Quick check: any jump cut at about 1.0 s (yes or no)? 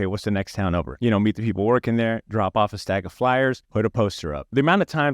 yes